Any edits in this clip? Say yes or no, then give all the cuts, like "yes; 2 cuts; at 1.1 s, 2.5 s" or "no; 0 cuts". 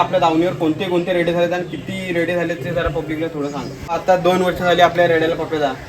yes; 1 cut; at 3.9 s